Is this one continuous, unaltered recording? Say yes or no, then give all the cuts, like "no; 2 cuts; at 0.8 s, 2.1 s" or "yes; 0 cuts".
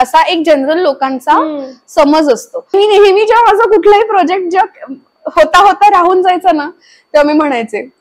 no; 1 cut; at 2.7 s